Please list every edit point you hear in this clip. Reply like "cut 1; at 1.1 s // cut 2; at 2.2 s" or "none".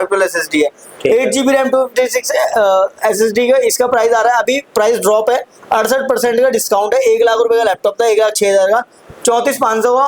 none